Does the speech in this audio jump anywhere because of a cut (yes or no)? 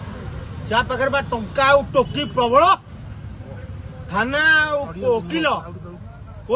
no